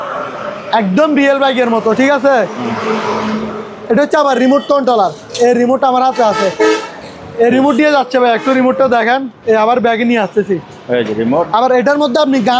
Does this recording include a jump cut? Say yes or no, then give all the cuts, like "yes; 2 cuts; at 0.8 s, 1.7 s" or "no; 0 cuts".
no; 0 cuts